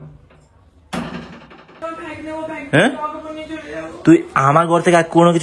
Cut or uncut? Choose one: cut